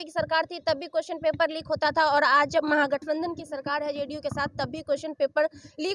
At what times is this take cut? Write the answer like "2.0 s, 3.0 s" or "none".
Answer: none